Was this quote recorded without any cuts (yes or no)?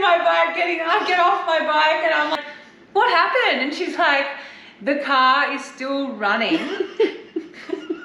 no